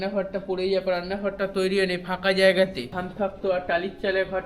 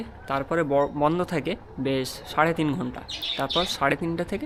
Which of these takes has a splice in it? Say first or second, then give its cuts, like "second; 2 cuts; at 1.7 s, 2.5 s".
first; 1 cut; at 3.0 s